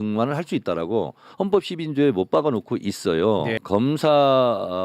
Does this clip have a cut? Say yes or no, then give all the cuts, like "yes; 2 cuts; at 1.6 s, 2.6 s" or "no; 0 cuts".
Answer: yes; 1 cut; at 3.6 s